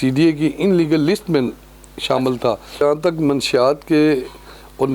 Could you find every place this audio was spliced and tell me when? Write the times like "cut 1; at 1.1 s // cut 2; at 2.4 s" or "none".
cut 1; at 2.8 s